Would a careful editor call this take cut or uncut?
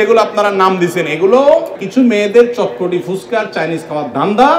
cut